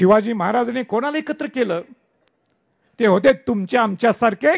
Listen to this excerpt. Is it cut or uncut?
uncut